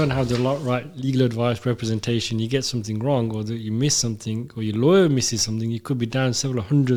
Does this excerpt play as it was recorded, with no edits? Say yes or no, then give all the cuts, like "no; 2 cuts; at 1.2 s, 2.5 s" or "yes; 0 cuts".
yes; 0 cuts